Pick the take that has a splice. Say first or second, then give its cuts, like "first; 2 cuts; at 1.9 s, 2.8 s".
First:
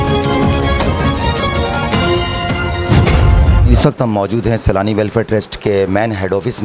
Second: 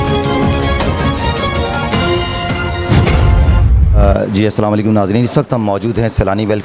first; 1 cut; at 3.7 s